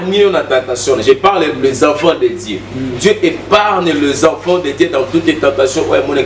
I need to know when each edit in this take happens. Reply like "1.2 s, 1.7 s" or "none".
none